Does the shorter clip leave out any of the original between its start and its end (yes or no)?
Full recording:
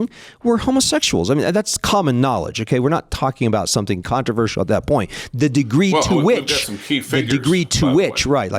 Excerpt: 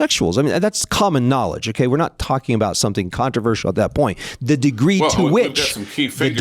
no